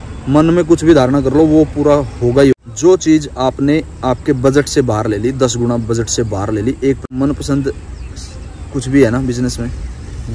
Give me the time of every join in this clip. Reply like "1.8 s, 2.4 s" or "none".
2.6 s, 7.2 s